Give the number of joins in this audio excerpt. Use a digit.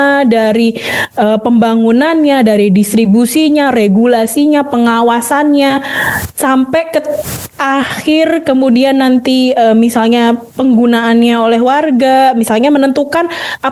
0